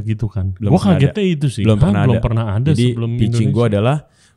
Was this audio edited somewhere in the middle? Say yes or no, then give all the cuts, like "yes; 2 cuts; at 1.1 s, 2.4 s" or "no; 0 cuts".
no; 0 cuts